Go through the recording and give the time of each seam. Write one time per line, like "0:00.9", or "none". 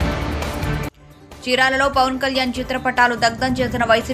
0:01.0

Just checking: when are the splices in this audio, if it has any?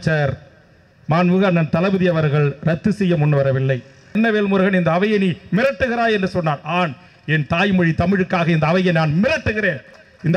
0:04.1

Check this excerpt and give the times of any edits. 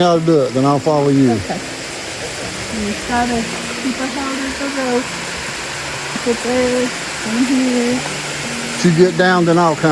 0:06.2
0:08.8

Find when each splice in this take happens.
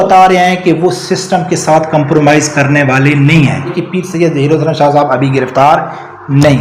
0:03.8

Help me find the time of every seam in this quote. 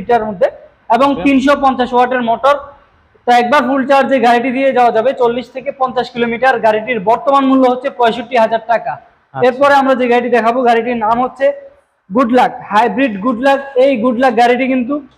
none

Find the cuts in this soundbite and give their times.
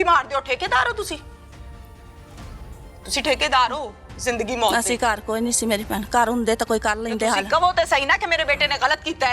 none

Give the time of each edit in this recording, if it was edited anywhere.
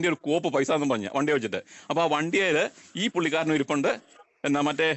none

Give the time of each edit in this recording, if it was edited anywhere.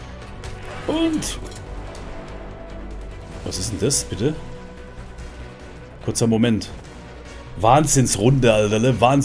none

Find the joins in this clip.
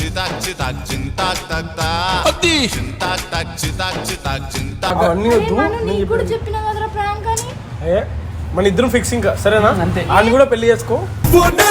0:04.9

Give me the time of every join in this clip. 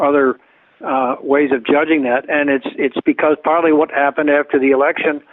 0:04.2

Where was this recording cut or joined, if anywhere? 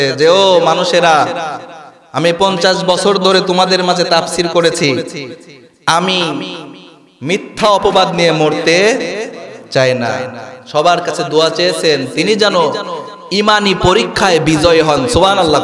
none

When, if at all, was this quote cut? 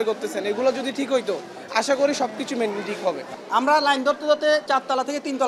0:03.3
0:04.6

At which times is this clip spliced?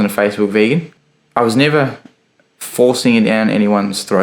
0:00.9

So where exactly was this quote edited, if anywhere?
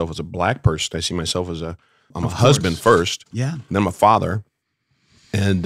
0:02.1

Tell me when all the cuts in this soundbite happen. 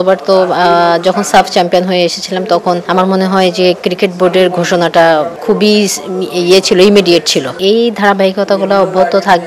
0:02.8
0:05.3
0:07.6

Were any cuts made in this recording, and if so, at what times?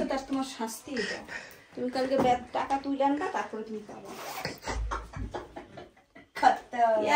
none

